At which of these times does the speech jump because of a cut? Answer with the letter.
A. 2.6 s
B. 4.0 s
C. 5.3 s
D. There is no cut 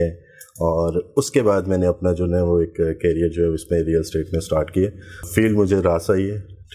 C